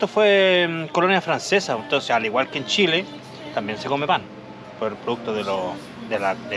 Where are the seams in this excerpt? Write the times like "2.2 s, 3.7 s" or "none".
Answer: none